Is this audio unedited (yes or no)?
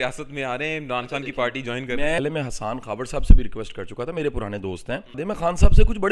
no